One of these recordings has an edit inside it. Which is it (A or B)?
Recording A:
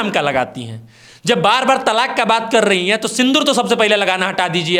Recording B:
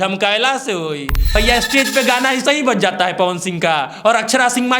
B